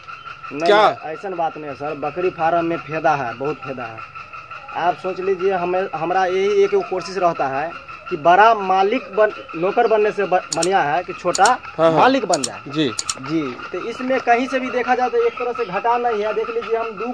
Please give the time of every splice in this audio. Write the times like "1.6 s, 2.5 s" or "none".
none